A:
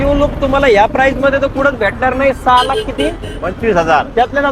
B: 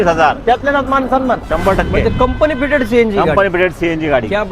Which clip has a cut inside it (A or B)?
B